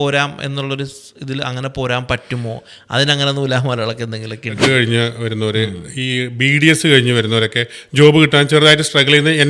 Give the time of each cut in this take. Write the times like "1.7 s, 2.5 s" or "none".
4.6 s